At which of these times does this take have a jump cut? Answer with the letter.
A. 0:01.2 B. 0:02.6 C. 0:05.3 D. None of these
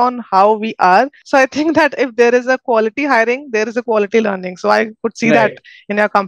A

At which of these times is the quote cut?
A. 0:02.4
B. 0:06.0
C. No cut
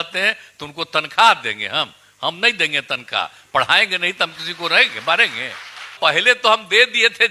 B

